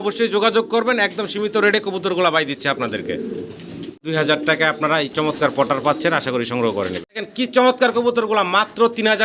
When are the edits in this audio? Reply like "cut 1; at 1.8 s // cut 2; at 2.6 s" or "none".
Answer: cut 1; at 4.1 s // cut 2; at 7.2 s